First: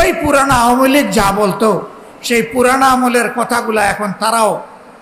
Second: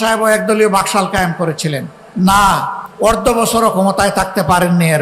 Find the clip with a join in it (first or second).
second